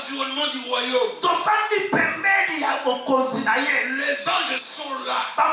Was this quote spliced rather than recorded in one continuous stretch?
no; 0 cuts

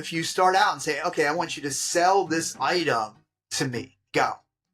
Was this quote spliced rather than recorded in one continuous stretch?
no; 0 cuts

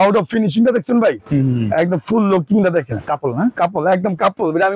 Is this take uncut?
yes; 0 cuts

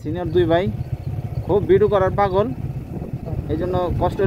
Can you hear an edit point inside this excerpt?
no; 0 cuts

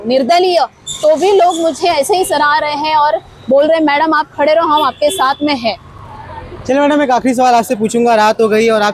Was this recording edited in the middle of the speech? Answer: no; 0 cuts

